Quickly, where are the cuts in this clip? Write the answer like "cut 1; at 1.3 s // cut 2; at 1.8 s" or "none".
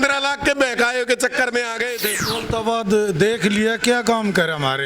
cut 1; at 2.1 s